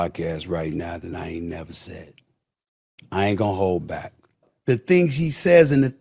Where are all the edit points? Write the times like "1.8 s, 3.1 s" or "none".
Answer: 4.5 s